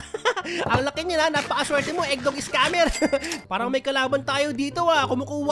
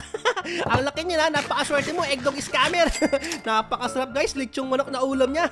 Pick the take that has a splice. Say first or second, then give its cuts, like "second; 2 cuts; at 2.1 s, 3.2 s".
first; 1 cut; at 3.3 s